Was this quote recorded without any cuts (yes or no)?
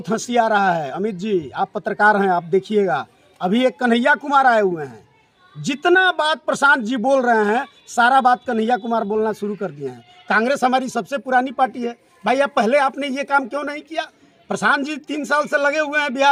yes